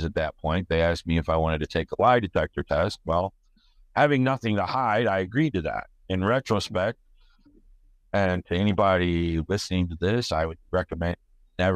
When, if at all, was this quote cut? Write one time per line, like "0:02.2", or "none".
0:05.9